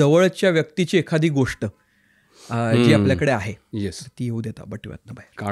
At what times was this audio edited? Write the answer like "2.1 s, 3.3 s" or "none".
3.6 s